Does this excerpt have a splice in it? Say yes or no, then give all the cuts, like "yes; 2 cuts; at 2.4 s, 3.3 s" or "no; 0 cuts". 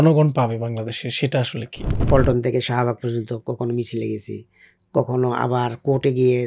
yes; 1 cut; at 1.9 s